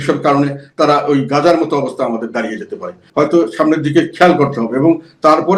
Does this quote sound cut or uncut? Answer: cut